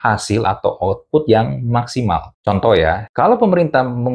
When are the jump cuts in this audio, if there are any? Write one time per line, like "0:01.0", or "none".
0:02.3
0:03.1